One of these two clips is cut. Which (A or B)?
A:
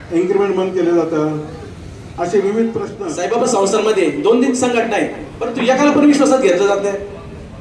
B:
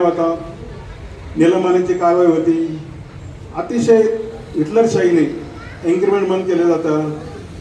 A